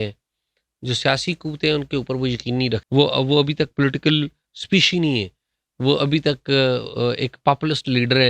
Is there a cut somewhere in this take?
yes; 1 cut; at 2.8 s

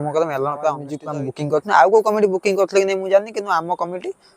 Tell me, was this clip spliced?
yes; 1 cut; at 0.9 s

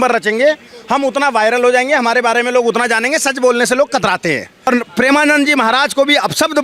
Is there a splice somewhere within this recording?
yes; 1 cut; at 4.7 s

